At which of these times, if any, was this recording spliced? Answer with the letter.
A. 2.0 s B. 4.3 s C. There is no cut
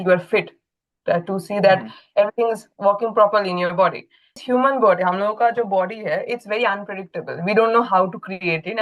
B